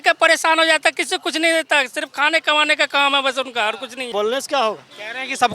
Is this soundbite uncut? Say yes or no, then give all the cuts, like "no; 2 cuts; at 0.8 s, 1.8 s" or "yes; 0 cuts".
no; 1 cut; at 4.1 s